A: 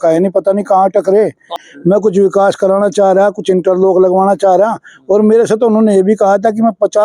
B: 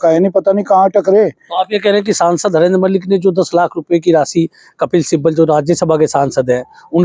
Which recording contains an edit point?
A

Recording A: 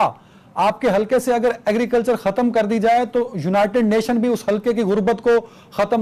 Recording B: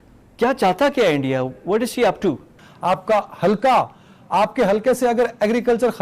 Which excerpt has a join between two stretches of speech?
B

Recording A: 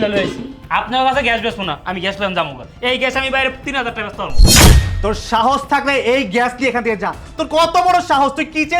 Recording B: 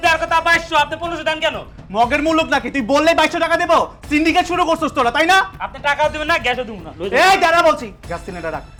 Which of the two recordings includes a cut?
A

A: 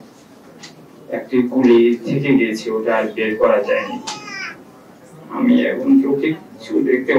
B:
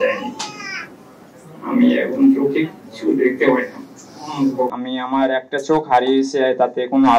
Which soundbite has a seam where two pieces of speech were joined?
B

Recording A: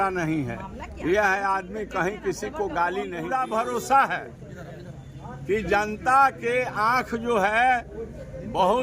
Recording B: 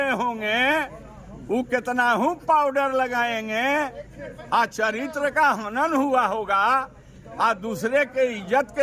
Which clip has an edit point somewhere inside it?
A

